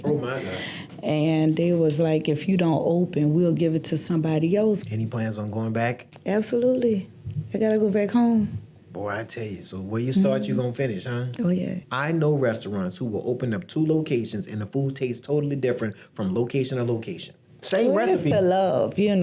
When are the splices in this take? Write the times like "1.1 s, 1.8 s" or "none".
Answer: 4.8 s, 11.9 s

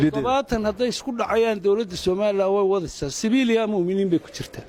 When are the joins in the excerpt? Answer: none

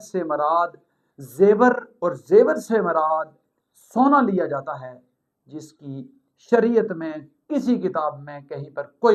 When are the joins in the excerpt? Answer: none

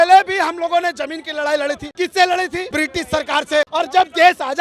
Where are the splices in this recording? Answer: 1.8 s, 2.7 s, 3.7 s

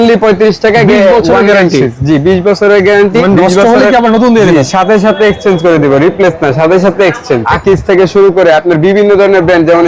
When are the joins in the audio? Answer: 3.2 s, 7.4 s

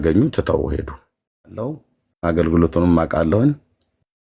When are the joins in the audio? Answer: 1.6 s

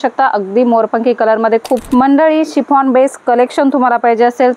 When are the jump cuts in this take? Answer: 1.8 s

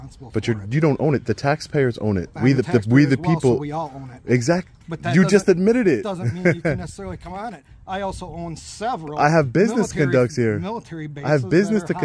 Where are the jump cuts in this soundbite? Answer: none

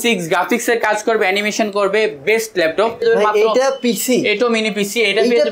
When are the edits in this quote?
3.0 s

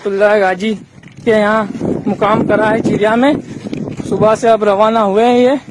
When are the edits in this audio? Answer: none

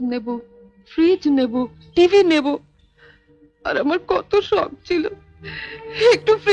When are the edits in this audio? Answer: none

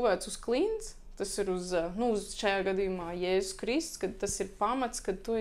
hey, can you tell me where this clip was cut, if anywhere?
none

